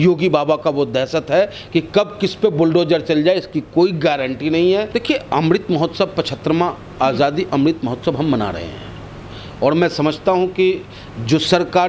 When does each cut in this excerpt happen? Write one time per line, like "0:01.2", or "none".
0:04.9